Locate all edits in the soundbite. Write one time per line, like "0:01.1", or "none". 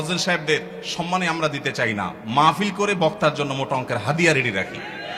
none

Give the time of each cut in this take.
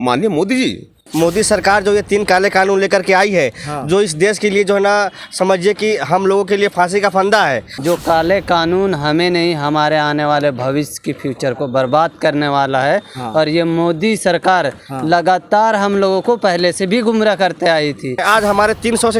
0:01.1
0:07.7
0:18.2

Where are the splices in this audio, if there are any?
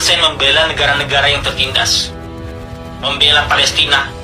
none

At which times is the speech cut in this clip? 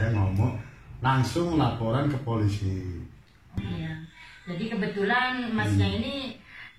0:03.6

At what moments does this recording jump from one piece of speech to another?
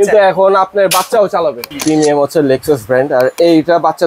0:01.7

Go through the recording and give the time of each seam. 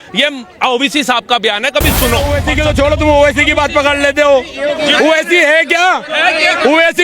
0:02.4

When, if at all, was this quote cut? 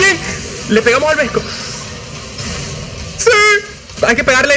none

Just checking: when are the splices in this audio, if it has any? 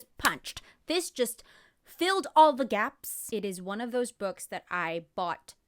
0:03.2

